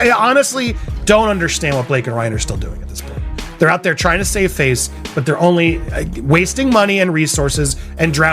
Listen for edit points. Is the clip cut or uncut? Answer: uncut